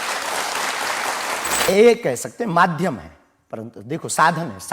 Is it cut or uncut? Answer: cut